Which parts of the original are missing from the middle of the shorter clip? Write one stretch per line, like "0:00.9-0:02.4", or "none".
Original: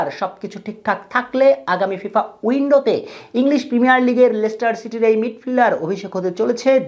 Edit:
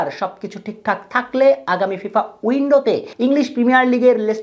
0:03.1-0:03.2